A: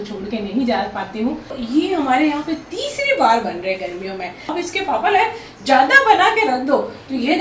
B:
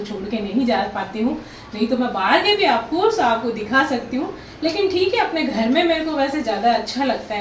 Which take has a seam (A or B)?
A